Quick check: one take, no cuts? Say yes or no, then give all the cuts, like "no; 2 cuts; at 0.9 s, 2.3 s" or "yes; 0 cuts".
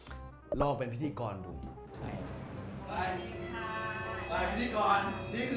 yes; 0 cuts